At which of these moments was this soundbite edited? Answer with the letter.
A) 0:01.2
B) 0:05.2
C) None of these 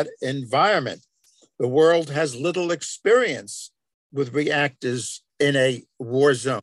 B